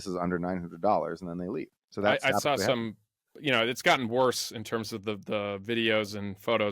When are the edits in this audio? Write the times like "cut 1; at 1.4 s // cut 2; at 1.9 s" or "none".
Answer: cut 1; at 1.8 s